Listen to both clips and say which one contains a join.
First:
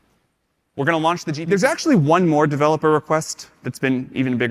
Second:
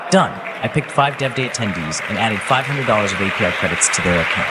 first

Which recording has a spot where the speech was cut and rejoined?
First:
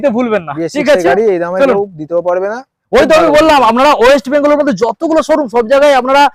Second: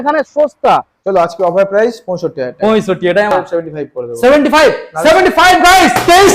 second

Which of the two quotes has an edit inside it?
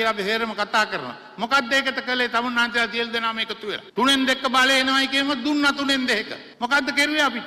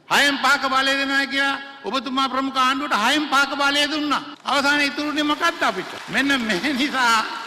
first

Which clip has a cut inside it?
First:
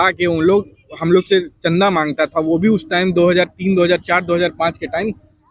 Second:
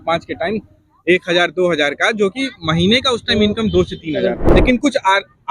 second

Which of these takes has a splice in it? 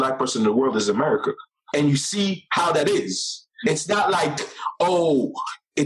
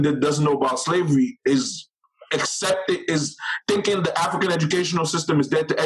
first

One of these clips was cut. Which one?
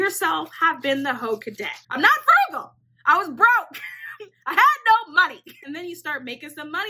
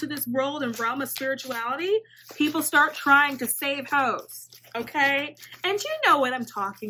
first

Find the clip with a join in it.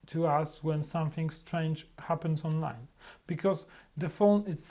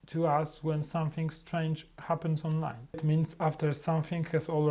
second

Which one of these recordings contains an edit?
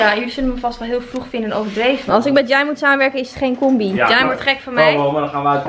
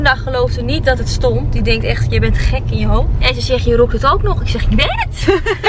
first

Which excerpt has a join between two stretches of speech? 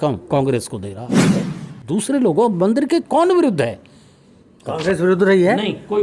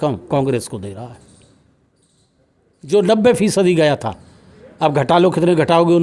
first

